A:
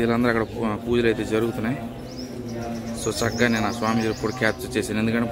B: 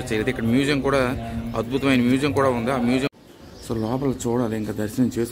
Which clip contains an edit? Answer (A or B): B